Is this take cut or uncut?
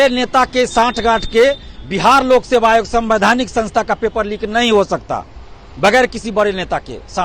uncut